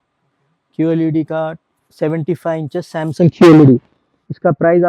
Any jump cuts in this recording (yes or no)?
no